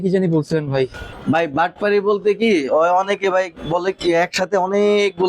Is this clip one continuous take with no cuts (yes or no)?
no